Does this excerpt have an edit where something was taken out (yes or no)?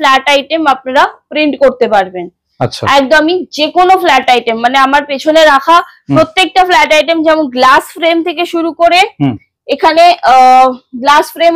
no